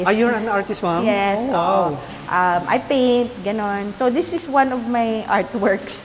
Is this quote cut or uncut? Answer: uncut